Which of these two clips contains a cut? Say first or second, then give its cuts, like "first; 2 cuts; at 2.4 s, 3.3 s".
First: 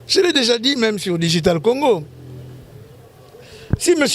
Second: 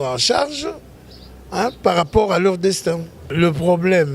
second; 1 cut; at 3.2 s